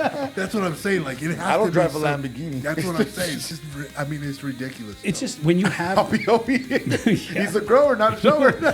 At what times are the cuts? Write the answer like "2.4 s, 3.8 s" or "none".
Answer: 3.5 s